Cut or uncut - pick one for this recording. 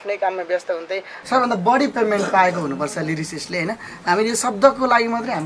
cut